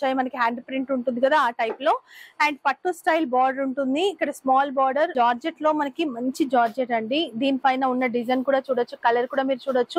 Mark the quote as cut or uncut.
cut